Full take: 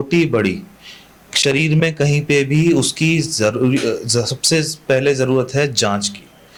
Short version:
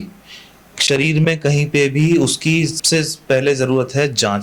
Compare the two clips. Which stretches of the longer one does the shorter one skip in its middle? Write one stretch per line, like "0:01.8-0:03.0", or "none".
0:03.3-0:04.4